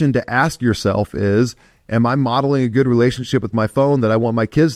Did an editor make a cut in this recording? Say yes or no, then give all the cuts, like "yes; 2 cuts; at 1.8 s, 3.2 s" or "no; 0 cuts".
no; 0 cuts